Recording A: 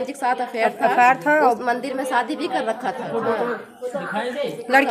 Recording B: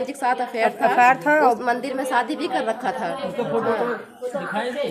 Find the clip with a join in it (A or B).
A